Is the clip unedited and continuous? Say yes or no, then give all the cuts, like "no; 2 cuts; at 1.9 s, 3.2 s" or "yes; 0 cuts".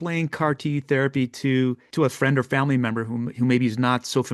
yes; 0 cuts